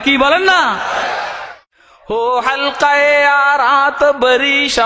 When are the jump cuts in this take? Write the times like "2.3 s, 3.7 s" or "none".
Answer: 1.3 s

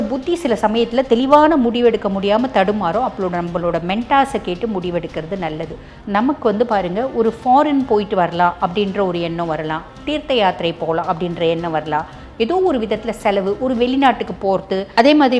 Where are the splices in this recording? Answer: 5.9 s

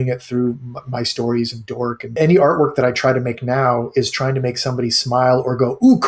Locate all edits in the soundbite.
2.2 s

